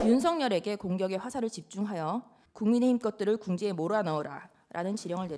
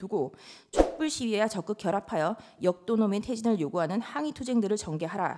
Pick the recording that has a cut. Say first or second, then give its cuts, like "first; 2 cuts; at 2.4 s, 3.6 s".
first; 1 cut; at 2.4 s